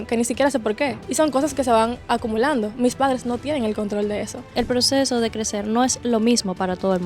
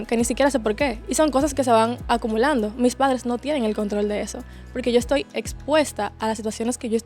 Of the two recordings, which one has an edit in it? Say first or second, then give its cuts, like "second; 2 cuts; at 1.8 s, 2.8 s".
first; 1 cut; at 4.5 s